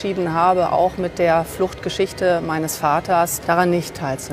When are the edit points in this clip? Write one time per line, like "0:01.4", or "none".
0:03.4